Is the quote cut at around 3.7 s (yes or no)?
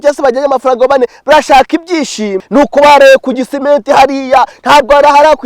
no